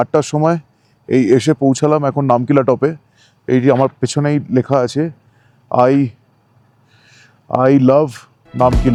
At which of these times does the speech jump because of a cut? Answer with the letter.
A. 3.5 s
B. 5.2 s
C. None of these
C